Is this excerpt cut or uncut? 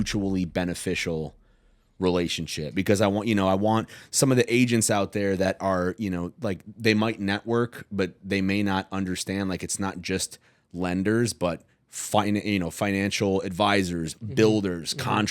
uncut